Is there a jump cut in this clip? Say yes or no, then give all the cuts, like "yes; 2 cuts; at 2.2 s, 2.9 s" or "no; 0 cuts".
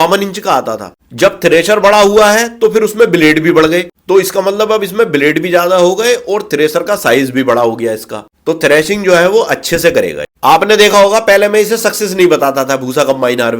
yes; 1 cut; at 10.2 s